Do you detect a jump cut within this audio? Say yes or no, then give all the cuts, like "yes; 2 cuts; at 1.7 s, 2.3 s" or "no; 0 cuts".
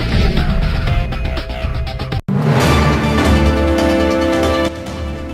yes; 1 cut; at 2.1 s